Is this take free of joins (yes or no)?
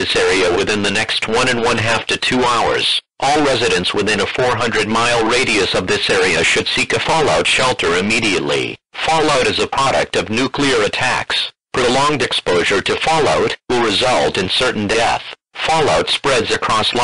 yes